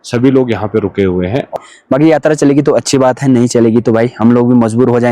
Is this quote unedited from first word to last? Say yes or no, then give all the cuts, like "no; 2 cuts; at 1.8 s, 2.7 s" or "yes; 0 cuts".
no; 1 cut; at 1.5 s